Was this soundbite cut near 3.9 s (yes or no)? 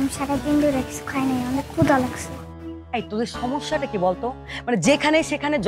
no